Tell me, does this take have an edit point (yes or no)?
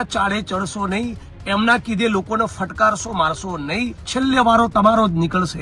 yes